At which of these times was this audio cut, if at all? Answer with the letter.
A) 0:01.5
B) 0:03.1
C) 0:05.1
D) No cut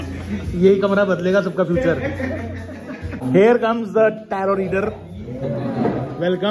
B